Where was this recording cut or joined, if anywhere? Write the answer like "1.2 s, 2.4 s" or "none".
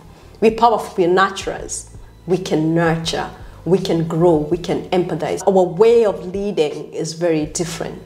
5.4 s